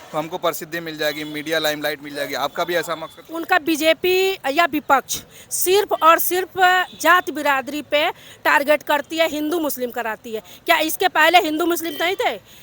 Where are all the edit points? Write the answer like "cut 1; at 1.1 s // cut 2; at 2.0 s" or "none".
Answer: cut 1; at 3.3 s